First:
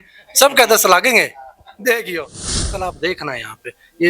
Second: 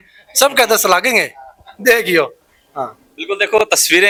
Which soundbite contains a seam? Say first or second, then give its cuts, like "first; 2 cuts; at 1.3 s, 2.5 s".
first; 1 cut; at 2.6 s